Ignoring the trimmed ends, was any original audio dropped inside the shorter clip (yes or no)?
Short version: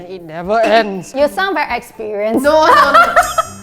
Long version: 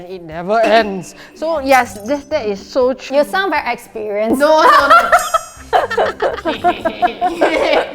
yes